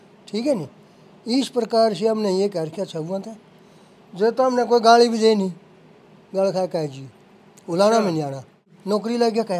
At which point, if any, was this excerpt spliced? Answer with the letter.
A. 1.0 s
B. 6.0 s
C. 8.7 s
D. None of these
C